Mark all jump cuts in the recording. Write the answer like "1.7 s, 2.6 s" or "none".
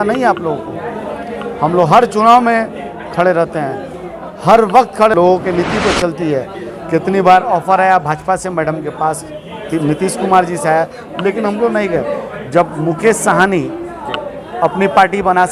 5.1 s